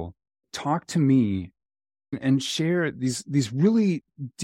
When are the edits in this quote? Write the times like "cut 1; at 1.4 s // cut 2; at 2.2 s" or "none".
none